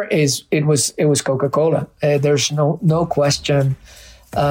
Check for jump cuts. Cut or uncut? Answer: uncut